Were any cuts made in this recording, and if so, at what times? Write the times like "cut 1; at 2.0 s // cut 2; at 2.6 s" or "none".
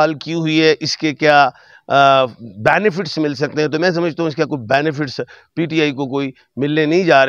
none